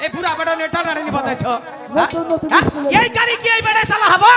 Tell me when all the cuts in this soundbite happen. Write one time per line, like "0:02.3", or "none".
none